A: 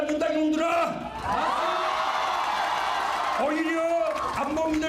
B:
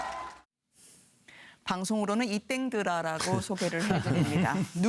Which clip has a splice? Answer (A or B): A